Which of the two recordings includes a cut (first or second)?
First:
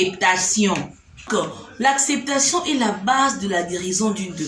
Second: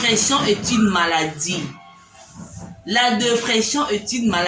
first